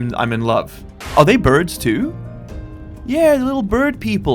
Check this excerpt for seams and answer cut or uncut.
cut